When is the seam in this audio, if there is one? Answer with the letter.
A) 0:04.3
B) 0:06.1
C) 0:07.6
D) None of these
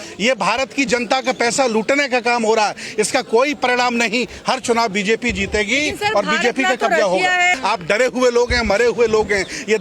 C